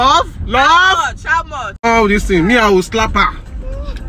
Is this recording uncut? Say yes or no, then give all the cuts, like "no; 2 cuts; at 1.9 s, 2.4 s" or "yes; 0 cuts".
no; 1 cut; at 1.8 s